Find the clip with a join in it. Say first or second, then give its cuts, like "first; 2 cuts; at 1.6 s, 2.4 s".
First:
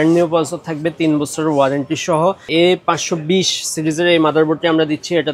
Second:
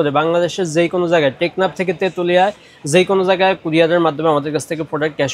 first; 1 cut; at 2.4 s